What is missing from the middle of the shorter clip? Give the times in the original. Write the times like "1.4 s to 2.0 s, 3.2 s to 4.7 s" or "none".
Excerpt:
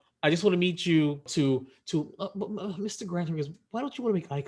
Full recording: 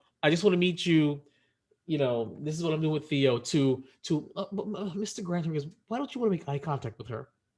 1.3 s to 3.4 s